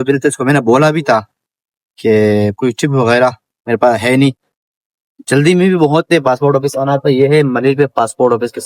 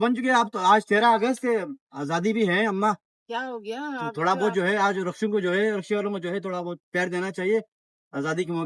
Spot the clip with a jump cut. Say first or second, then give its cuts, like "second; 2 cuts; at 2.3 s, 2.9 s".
first; 1 cut; at 3.5 s